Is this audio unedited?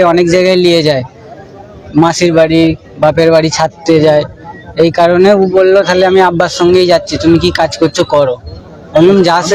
yes; 0 cuts

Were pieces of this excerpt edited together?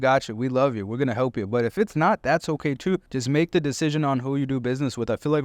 yes; 1 cut; at 3.1 s

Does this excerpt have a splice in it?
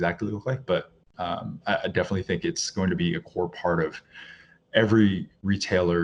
no; 0 cuts

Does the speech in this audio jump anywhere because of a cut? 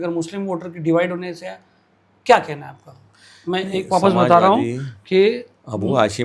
no; 0 cuts

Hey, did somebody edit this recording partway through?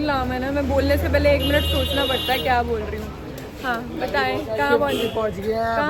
no; 0 cuts

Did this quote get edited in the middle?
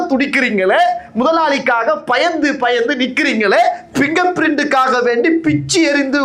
no; 0 cuts

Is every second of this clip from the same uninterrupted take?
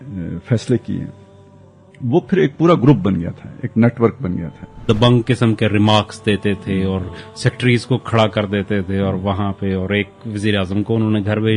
no; 1 cut; at 4.7 s

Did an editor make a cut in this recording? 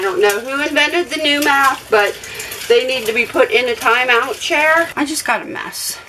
yes; 1 cut; at 4.9 s

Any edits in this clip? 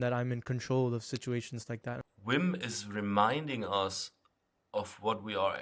yes; 1 cut; at 1.9 s

